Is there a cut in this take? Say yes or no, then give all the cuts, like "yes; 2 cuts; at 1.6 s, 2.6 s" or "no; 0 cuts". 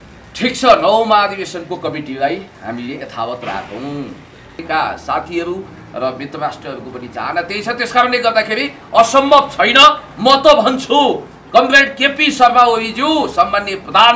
yes; 1 cut; at 4.6 s